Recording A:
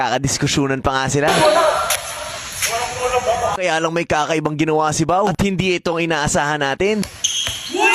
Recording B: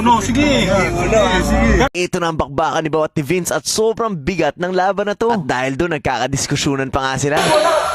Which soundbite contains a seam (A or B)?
B